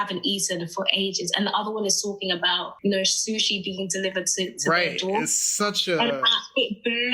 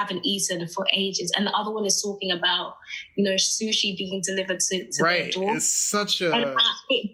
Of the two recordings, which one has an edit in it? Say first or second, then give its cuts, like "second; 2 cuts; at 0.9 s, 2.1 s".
first; 1 cut; at 2.7 s